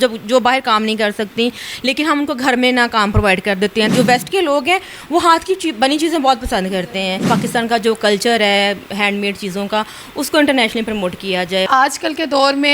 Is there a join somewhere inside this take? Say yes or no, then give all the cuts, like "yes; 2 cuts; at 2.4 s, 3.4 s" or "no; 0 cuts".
yes; 3 cuts; at 3.9 s, 7.3 s, 11.7 s